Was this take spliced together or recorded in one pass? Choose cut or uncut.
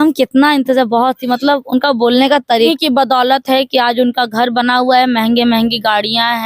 cut